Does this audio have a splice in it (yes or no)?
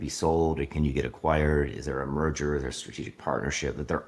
no